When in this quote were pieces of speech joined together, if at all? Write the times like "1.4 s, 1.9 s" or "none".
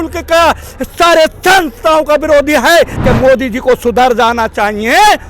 3.0 s